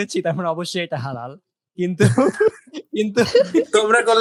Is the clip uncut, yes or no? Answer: yes